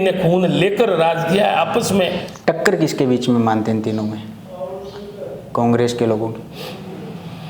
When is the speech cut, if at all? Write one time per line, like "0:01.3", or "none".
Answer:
0:02.3

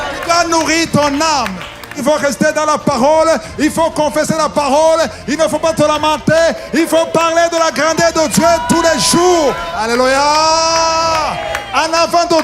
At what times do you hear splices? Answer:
0:02.0
0:09.7

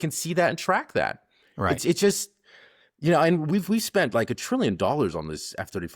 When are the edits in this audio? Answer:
none

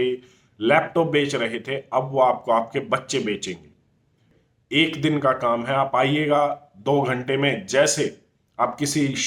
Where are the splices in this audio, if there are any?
0:04.3

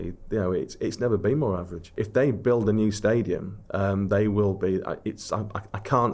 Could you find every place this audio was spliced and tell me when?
0:01.9

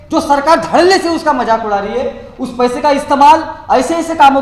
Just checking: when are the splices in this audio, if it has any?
none

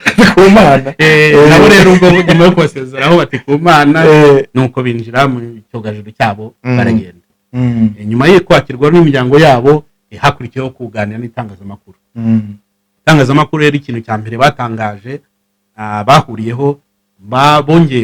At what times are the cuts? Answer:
0:07.2

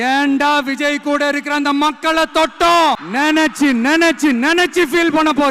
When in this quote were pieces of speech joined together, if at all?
0:03.1

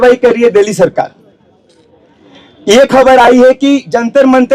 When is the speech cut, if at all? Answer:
none

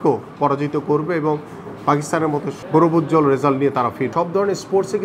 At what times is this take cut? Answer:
0:02.6
0:04.1

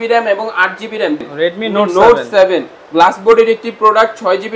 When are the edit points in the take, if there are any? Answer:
0:01.3

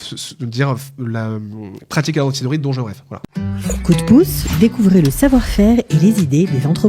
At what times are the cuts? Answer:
0:03.1

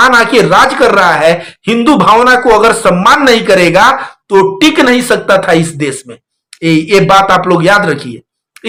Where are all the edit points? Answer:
none

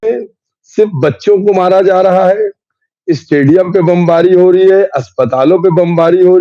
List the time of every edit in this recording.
none

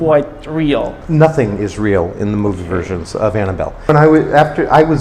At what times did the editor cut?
0:03.9

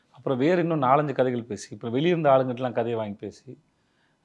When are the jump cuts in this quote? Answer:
none

